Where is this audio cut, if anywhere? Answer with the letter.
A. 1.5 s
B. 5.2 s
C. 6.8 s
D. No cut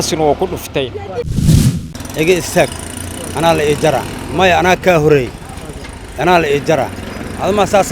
A